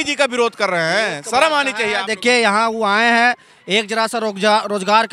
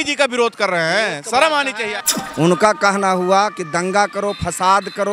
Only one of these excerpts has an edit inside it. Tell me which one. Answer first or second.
second